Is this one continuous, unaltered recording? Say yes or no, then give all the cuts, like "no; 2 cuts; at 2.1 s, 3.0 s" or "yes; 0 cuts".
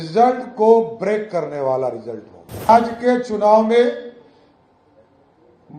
no; 1 cut; at 2.7 s